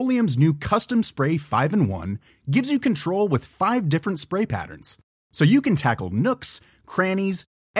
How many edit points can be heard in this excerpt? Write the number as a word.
zero